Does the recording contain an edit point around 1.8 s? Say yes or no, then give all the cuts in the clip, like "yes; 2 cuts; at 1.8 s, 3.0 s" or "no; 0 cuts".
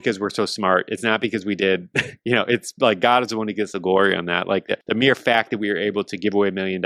no; 1 cut; at 4.8 s